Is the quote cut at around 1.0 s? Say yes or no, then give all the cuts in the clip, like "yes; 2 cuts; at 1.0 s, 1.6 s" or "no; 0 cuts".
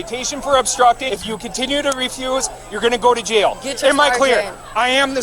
yes; 1 cut; at 1.0 s